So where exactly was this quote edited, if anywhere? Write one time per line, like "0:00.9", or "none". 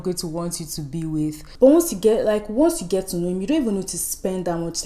0:01.4